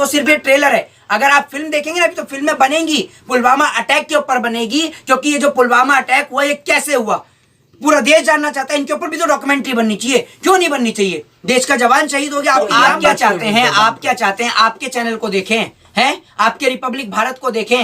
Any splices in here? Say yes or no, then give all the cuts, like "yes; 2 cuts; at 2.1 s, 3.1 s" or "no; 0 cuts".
yes; 1 cut; at 12.7 s